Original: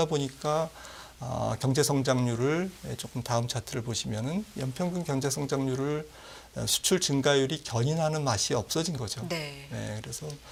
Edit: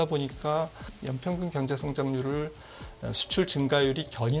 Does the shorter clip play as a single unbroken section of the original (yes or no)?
no